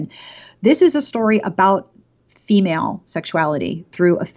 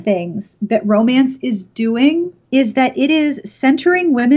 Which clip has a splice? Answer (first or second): second